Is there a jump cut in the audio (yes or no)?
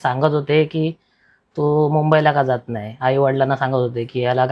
no